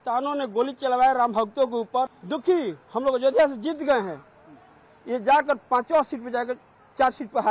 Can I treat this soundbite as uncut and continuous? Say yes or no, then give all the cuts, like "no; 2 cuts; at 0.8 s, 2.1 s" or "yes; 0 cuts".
yes; 0 cuts